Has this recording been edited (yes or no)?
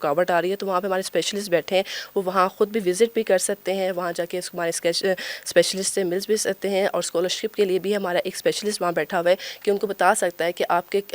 no